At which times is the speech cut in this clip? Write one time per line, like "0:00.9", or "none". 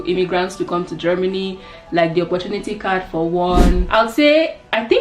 0:03.9